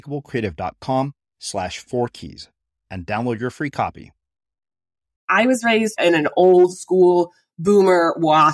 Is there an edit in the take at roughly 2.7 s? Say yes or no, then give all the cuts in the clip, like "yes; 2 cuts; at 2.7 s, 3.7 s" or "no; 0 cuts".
no; 2 cuts; at 5.2 s, 6.0 s